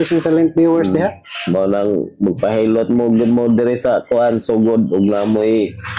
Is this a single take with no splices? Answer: yes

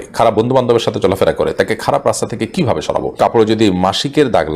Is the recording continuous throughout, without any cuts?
no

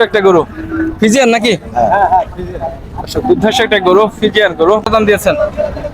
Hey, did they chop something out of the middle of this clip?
yes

